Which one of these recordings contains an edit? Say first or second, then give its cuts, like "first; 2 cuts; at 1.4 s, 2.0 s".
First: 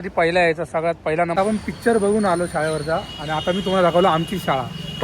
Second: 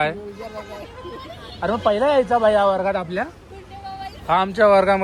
first; 1 cut; at 1.3 s